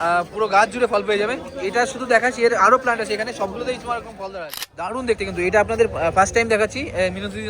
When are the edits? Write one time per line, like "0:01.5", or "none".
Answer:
0:04.9